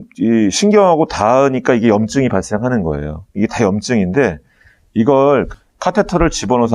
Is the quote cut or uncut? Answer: cut